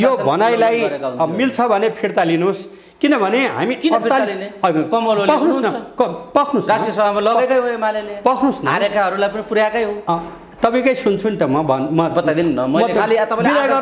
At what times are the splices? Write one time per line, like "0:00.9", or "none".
none

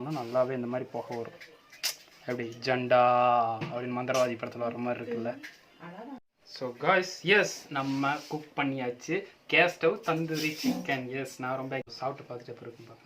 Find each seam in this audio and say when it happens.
0:06.3
0:11.9

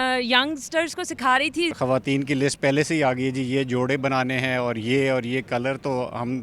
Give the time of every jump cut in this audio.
0:01.8

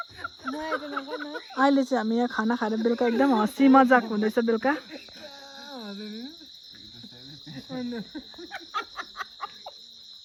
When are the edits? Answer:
none

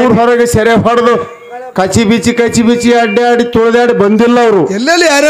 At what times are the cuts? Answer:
none

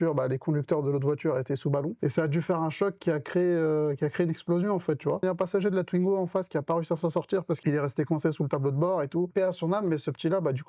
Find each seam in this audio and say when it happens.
0:01.9
0:05.2
0:07.6
0:09.3

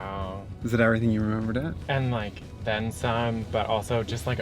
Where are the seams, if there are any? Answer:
0:01.8

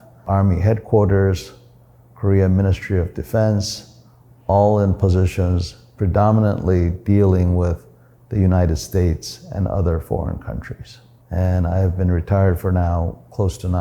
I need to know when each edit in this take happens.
none

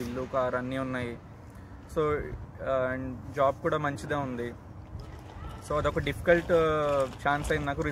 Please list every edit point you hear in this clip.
none

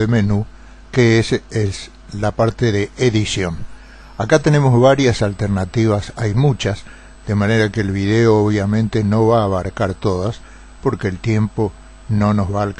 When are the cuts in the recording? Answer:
0:07.2

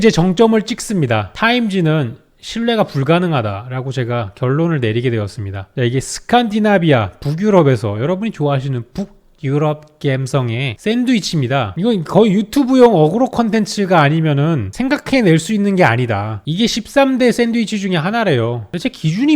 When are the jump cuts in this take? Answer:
0:05.8
0:11.7
0:16.3

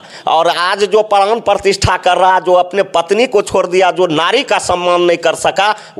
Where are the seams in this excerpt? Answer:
none

